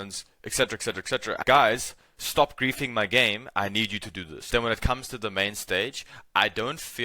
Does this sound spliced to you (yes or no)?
yes